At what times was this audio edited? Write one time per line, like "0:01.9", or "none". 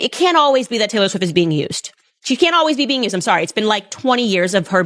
none